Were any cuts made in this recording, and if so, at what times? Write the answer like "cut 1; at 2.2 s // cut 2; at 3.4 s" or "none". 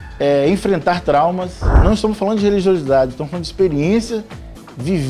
cut 1; at 1.6 s